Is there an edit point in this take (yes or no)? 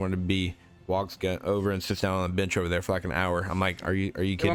no